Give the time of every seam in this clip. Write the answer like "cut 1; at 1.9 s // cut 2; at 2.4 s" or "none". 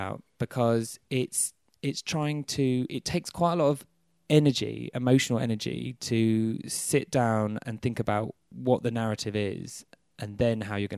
cut 1; at 8.4 s